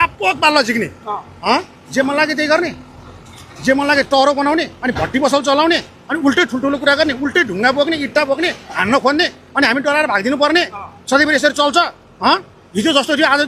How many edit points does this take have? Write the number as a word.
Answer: zero